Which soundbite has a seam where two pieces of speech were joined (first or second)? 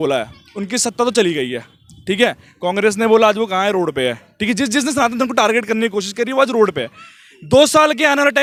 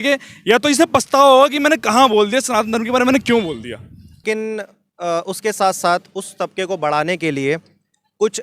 second